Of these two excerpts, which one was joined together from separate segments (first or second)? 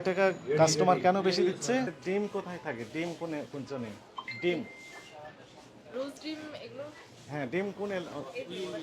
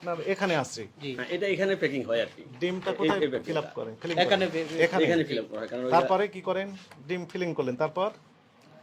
first